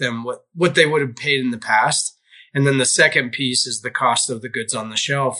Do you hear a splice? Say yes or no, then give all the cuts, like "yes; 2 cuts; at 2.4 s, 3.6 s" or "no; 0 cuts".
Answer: no; 0 cuts